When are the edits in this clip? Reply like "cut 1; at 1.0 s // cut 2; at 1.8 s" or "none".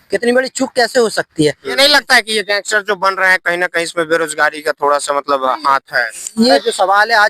cut 1; at 1.8 s // cut 2; at 6.6 s